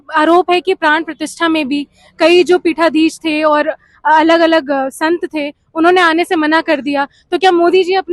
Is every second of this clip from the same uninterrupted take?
yes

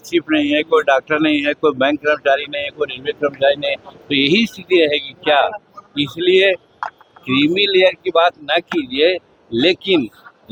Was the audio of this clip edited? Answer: no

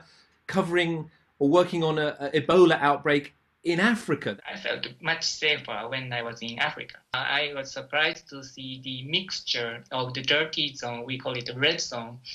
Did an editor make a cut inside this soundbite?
yes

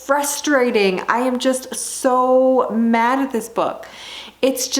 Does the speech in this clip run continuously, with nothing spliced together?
yes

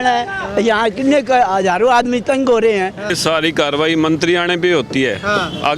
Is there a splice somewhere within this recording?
yes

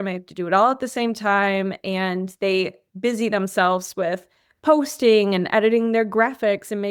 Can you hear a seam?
no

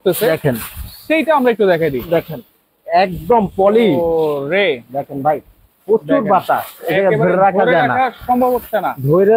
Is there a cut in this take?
no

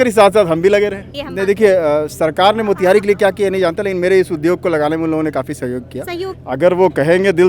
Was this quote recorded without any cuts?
no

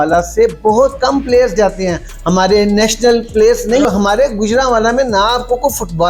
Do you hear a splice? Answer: yes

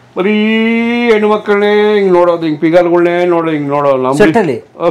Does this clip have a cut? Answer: no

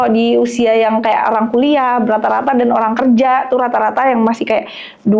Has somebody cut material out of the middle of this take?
no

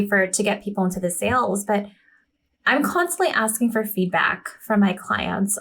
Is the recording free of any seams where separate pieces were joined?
yes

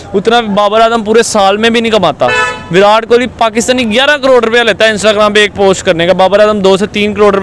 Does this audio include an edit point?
no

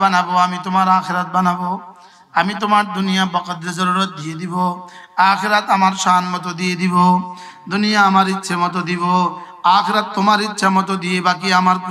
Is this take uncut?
yes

